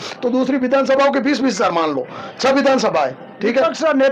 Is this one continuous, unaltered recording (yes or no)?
yes